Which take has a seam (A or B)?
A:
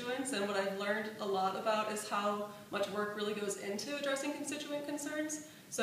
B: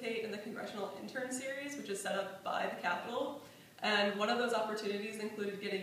A